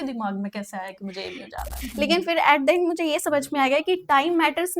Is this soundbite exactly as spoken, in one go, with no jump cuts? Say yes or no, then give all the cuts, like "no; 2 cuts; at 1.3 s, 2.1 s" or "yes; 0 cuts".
no; 1 cut; at 1.8 s